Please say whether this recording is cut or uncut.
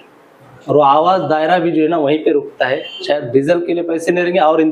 uncut